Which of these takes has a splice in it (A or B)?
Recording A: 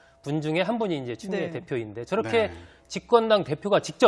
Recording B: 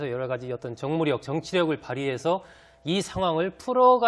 B